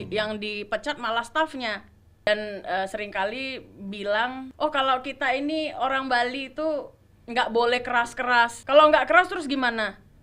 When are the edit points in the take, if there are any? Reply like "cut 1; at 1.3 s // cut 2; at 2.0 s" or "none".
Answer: cut 1; at 2.3 s // cut 2; at 4.5 s // cut 3; at 8.6 s